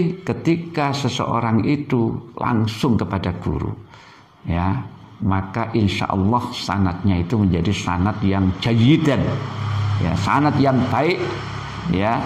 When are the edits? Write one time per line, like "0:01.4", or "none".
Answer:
none